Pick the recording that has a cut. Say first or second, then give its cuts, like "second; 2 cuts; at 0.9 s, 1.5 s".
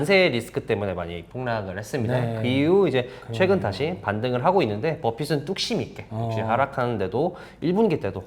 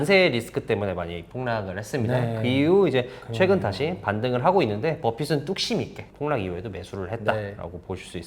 second; 1 cut; at 6.0 s